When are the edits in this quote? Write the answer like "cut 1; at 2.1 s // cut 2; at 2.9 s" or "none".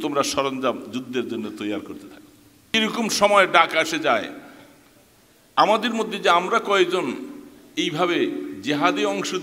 cut 1; at 2.7 s